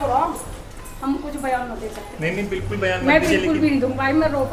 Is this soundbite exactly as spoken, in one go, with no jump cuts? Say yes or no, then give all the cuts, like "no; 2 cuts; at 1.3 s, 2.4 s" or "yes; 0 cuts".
yes; 0 cuts